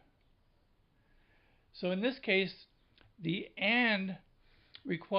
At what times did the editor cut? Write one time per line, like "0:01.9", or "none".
0:03.7